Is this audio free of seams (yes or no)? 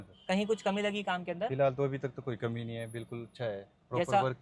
yes